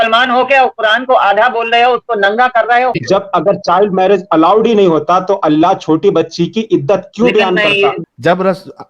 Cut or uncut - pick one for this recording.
cut